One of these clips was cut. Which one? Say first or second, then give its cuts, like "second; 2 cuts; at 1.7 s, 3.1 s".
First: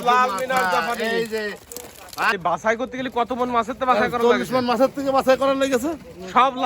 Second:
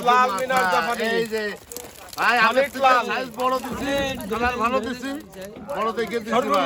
first; 1 cut; at 2.3 s